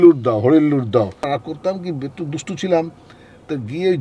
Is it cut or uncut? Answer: cut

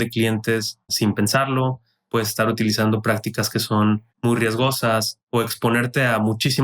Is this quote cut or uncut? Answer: cut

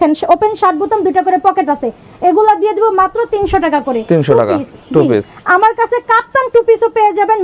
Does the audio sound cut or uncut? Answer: uncut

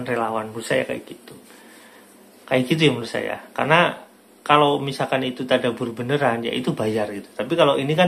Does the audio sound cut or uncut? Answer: uncut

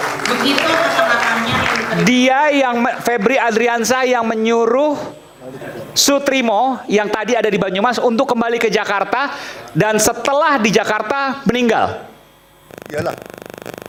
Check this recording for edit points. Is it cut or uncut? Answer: uncut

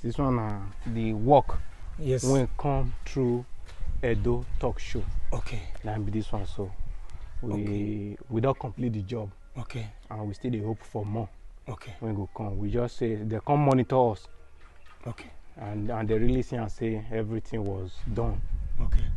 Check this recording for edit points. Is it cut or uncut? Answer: uncut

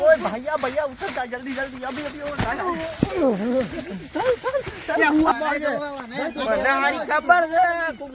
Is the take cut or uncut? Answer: cut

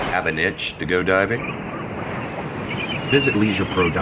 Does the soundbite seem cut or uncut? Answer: uncut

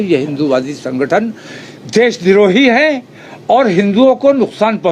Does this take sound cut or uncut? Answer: uncut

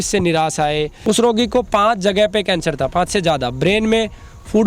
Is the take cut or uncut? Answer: cut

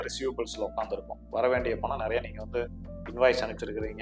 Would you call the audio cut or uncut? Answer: uncut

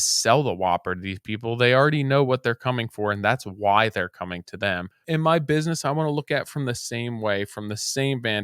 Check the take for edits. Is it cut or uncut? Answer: cut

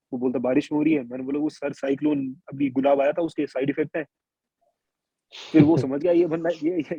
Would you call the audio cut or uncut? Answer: uncut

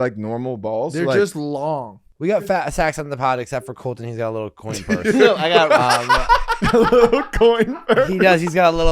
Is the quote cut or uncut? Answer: cut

